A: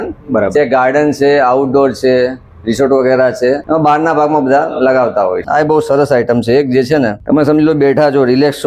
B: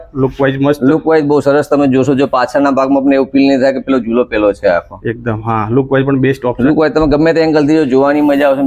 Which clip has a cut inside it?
A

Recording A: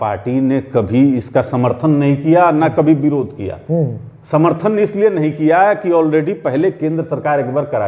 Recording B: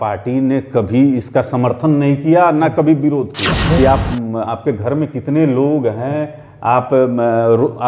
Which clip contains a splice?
B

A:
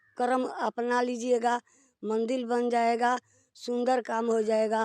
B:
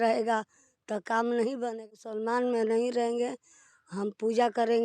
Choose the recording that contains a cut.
B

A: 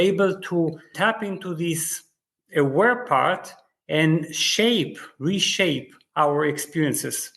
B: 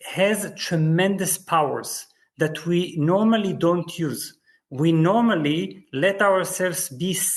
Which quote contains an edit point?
A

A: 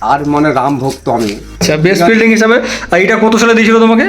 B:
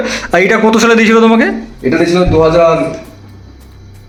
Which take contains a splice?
A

